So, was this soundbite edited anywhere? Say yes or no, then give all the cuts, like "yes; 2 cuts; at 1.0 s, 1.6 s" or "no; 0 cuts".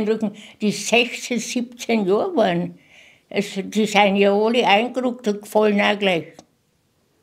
no; 0 cuts